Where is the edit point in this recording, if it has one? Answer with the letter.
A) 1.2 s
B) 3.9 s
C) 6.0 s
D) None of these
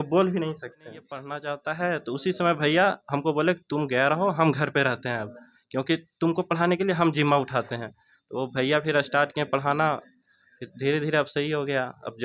A